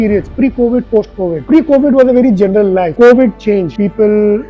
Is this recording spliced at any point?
yes; 3 cuts; at 1.4 s, 2.9 s, 3.7 s

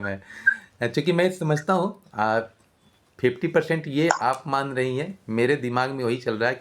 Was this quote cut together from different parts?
no; 0 cuts

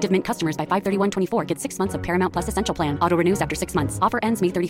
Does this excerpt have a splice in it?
no; 0 cuts

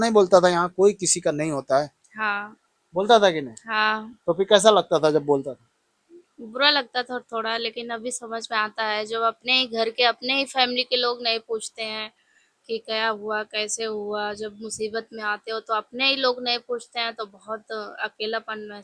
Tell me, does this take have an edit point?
no; 0 cuts

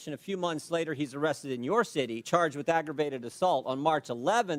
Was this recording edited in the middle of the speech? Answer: yes; 1 cut; at 2.2 s

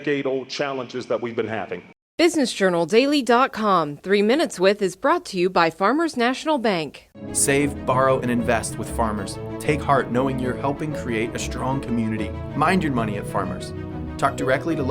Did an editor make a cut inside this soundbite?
yes; 1 cut; at 1.8 s

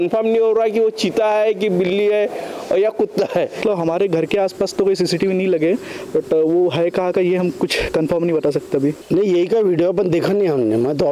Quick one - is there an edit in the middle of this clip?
yes; 2 cuts; at 3.6 s, 9.0 s

